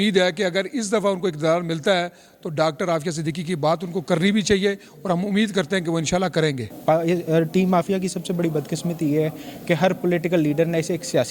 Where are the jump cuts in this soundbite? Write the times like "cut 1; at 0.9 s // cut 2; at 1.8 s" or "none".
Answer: cut 1; at 6.7 s